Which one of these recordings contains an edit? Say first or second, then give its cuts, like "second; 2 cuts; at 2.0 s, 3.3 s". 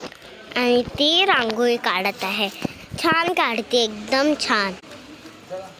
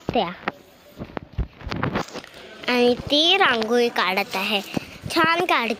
first; 1 cut; at 4.8 s